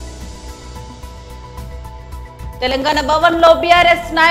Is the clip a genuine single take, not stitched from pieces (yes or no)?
no